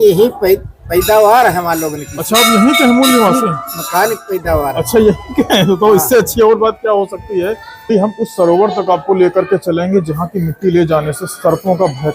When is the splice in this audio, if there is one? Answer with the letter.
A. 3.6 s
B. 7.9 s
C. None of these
B